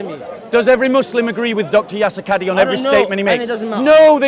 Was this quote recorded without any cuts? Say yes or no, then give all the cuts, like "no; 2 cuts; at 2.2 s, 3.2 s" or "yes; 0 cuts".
yes; 0 cuts